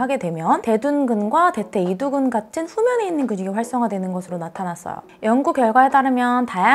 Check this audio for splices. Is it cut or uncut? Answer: cut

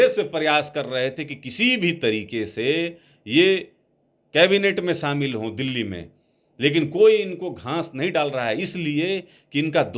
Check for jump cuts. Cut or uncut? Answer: uncut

